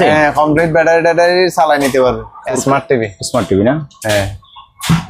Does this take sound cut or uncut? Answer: cut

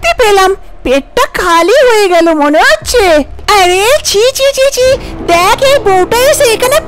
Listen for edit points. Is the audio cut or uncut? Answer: cut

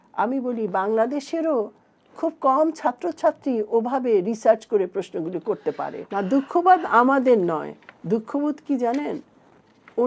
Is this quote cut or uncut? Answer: cut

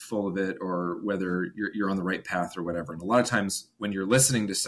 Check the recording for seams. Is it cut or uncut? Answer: uncut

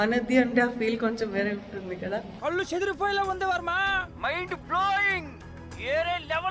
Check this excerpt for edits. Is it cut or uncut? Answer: uncut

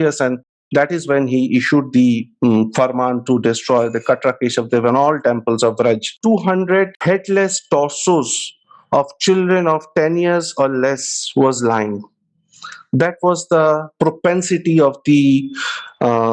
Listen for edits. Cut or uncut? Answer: cut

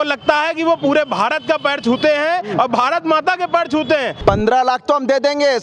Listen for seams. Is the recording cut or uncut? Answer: cut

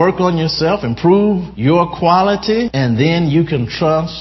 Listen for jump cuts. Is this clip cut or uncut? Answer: cut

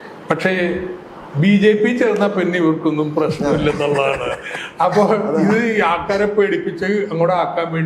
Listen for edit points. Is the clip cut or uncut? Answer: uncut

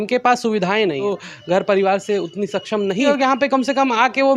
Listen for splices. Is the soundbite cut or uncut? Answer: cut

